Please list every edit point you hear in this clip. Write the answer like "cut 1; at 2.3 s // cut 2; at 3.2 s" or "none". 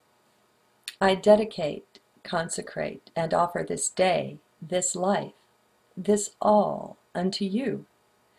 cut 1; at 5.6 s